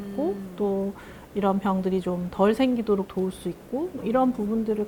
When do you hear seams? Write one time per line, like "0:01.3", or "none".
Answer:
none